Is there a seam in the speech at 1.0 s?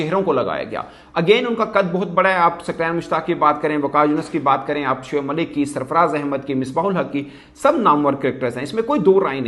no; 0 cuts

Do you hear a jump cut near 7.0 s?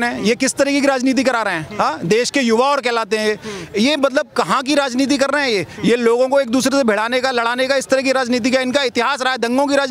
no; 0 cuts

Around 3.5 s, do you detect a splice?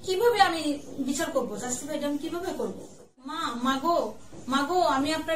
yes; 1 cut; at 3.5 s

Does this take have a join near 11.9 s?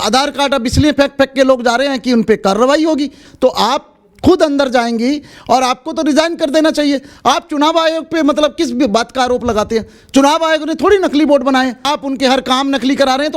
yes; 2 cuts; at 3.2 s, 11.9 s

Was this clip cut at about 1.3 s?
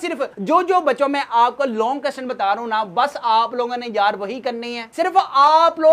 no; 1 cut; at 4.7 s

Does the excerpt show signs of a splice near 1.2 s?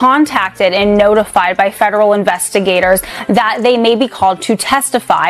no; 0 cuts

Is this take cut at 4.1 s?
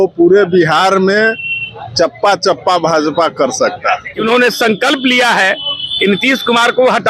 yes; 1 cut; at 4.1 s

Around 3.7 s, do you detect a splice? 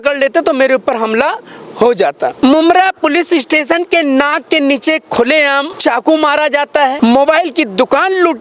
no; 3 cuts; at 2.4 s, 5.7 s, 6.9 s

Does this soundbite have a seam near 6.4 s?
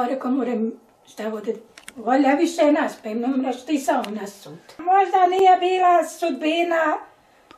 no; 1 cut; at 4.8 s

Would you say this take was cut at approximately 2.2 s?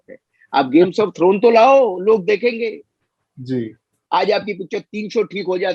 no; 1 cut; at 3.9 s

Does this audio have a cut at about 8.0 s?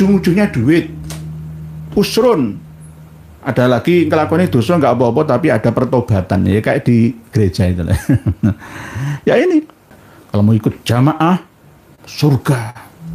no; 1 cut; at 10.0 s

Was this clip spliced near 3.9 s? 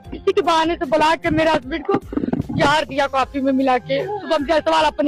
no; 0 cuts

